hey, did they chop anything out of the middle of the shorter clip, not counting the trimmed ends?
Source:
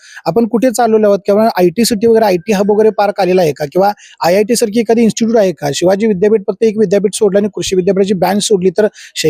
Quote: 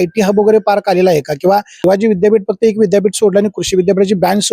yes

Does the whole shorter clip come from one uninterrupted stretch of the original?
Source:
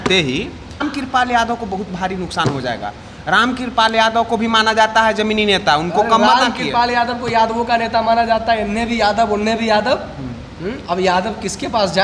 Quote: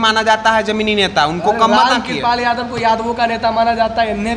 yes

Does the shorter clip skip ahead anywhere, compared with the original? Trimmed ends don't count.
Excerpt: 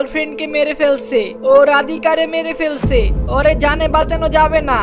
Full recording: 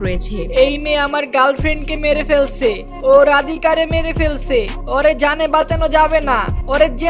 yes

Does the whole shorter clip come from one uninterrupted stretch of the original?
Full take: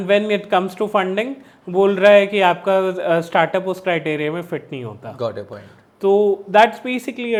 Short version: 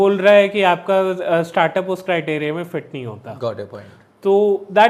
yes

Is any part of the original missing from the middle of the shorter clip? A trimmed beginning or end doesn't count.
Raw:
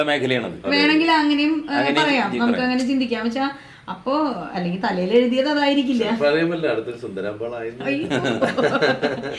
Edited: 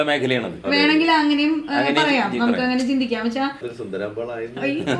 yes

